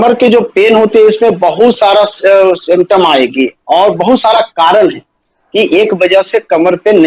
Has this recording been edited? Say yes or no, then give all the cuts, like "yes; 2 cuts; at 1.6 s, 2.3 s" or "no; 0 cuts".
no; 0 cuts